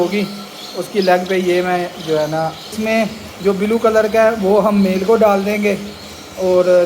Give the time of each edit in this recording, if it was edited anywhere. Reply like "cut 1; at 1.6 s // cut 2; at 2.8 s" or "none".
cut 1; at 2.8 s